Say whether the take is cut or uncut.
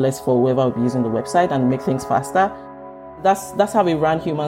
cut